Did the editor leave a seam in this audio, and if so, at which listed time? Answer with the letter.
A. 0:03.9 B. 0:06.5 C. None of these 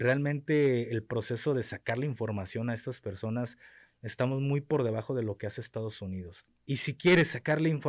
B